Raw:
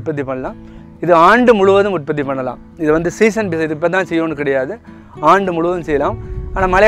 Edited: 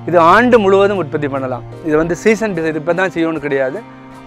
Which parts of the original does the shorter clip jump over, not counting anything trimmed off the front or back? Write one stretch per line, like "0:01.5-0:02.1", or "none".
none